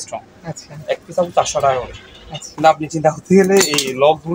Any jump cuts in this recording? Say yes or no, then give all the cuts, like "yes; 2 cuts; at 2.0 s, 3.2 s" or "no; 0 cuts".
no; 0 cuts